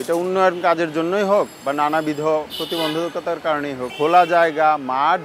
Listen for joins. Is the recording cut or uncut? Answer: cut